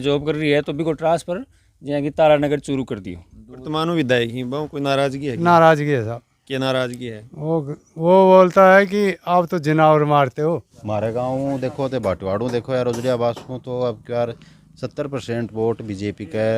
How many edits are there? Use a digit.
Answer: 2